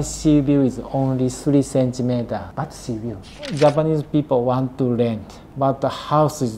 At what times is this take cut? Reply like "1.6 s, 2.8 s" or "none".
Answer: 3.3 s, 5.4 s